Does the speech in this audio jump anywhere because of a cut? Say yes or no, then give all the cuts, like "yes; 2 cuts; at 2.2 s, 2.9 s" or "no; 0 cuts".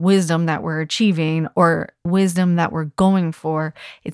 yes; 1 cut; at 2.0 s